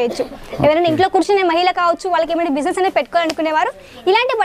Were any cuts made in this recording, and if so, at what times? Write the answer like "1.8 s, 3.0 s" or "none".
none